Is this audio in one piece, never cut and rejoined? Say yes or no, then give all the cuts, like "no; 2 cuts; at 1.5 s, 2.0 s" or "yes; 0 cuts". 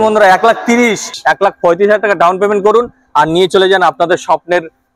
no; 1 cut; at 1.1 s